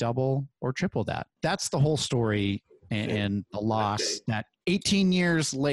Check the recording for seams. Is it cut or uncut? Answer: cut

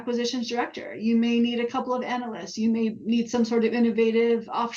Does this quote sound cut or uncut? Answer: uncut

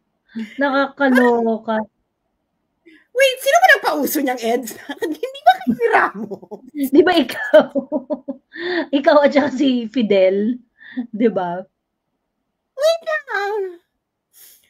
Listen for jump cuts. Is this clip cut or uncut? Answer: uncut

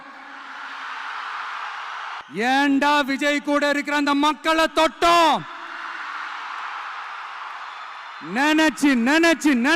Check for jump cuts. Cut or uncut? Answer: cut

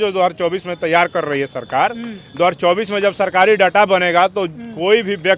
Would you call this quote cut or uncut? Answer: uncut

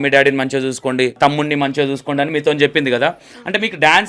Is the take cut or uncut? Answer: cut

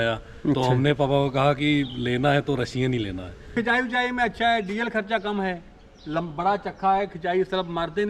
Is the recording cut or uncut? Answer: cut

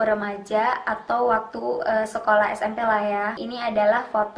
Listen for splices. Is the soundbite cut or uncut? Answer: cut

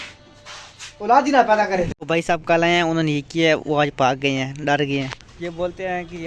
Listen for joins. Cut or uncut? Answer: cut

